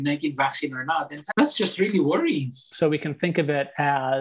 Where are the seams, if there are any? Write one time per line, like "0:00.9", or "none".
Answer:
0:01.2
0:02.7